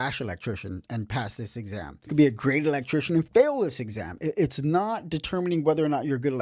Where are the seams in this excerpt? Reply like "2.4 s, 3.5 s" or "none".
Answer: 2.1 s